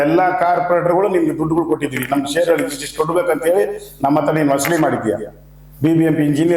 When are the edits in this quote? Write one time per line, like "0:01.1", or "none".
none